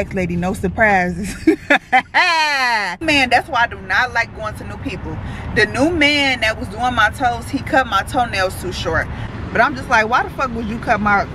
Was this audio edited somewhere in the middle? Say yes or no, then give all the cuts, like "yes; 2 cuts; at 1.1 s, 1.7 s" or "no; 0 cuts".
yes; 2 cuts; at 3.0 s, 9.2 s